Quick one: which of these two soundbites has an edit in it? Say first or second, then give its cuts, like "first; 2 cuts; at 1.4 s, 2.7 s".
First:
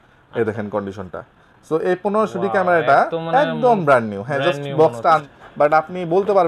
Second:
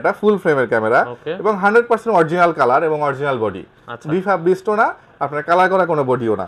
first; 1 cut; at 5.2 s